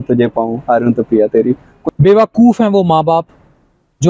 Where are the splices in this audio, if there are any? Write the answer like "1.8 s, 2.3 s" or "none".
1.8 s